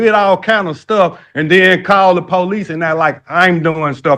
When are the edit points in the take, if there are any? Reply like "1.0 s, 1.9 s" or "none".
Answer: none